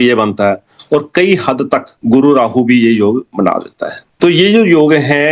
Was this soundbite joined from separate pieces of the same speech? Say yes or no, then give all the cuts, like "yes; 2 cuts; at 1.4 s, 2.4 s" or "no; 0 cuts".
no; 0 cuts